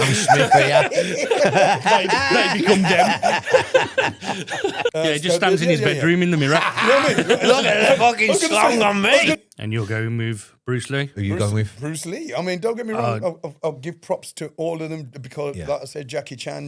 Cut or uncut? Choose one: cut